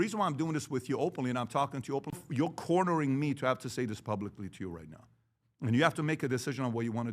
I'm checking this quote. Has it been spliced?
yes; 1 cut; at 2.1 s

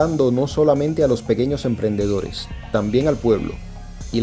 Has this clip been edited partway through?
no; 0 cuts

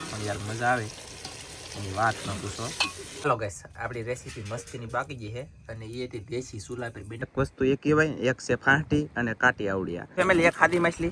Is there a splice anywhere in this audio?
yes; 3 cuts; at 3.2 s, 7.3 s, 10.0 s

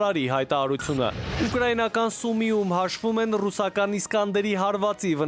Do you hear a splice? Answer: no; 0 cuts

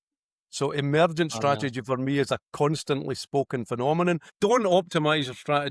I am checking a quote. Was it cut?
yes; 1 cut; at 4.3 s

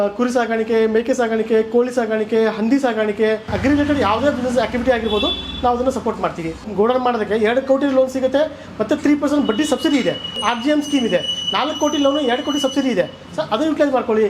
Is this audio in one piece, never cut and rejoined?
no; 3 cuts; at 3.5 s, 6.6 s, 10.4 s

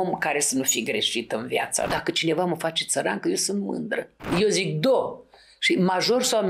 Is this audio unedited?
no; 2 cuts; at 1.9 s, 4.2 s

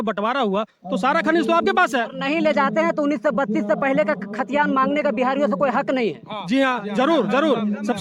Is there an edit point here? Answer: no; 0 cuts

